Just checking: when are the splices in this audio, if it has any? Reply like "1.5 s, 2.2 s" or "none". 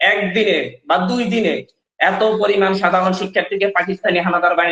none